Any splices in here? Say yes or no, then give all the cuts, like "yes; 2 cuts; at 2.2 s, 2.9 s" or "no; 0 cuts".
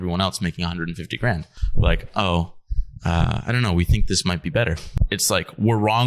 yes; 2 cuts; at 1.6 s, 4.9 s